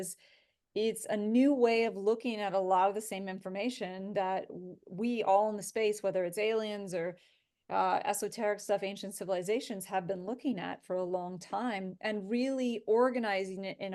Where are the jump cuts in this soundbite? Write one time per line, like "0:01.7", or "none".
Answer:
none